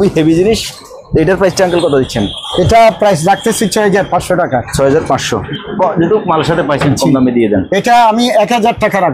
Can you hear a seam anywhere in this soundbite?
yes; 1 cut; at 5.5 s

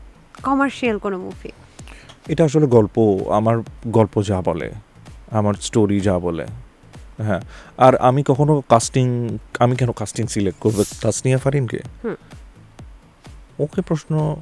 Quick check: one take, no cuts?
no; 1 cut; at 10.9 s

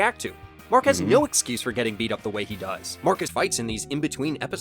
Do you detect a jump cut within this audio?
yes; 1 cut; at 3.3 s

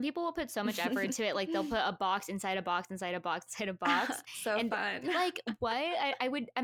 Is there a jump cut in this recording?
no; 0 cuts

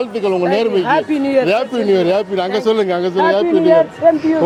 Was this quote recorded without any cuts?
yes; 0 cuts

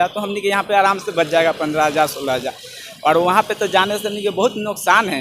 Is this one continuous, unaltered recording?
yes; 0 cuts

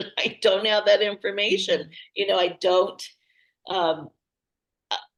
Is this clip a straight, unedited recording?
yes; 0 cuts

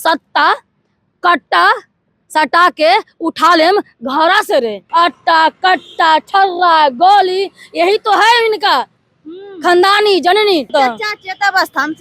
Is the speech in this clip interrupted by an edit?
yes; 2 cuts; at 4.8 s, 10.7 s

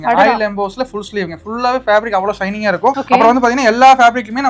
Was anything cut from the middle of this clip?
no; 0 cuts

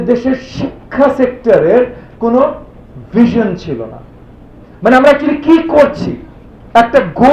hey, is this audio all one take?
yes; 0 cuts

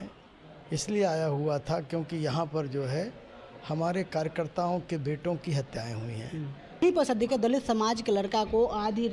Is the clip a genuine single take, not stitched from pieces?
no; 1 cut; at 6.8 s

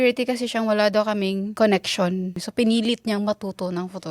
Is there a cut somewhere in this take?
yes; 2 cuts; at 1.5 s, 2.4 s

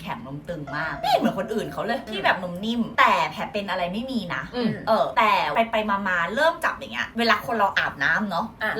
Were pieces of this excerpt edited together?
no; 0 cuts

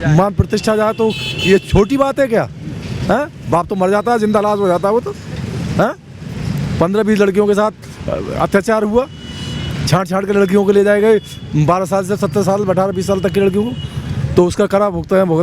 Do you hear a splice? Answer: no; 0 cuts

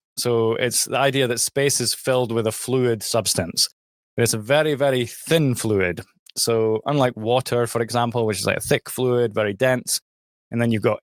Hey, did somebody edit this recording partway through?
no; 0 cuts

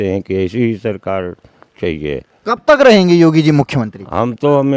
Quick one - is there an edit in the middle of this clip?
no; 0 cuts

